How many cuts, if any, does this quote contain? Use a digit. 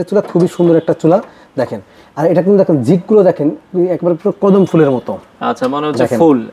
0